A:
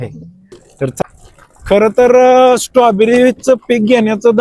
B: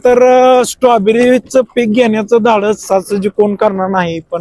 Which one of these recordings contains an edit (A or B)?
A